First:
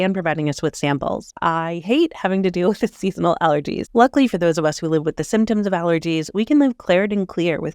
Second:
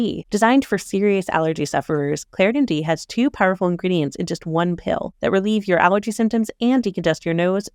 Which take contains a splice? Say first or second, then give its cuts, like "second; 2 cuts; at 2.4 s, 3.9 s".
first; 2 cuts; at 1.3 s, 3.8 s